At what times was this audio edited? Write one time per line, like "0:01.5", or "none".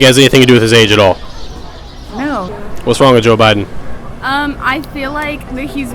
0:02.5